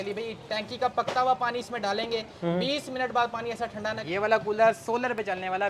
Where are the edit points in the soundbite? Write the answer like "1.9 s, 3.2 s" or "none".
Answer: 4.0 s